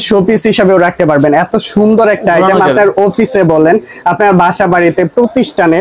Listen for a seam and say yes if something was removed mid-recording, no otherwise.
no